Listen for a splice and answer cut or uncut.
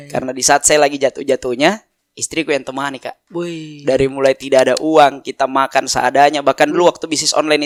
uncut